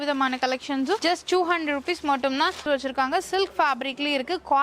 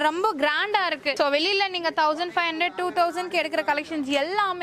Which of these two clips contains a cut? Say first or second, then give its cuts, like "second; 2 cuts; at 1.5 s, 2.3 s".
first; 1 cut; at 2.6 s